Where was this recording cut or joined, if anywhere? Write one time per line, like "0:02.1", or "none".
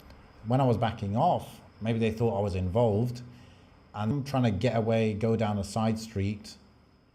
0:04.1